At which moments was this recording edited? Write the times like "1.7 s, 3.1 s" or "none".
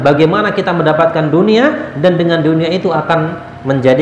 none